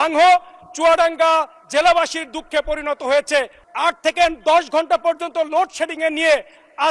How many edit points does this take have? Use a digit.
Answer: 1